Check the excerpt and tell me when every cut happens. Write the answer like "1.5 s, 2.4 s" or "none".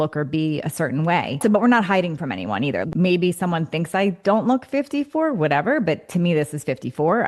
1.4 s, 2.8 s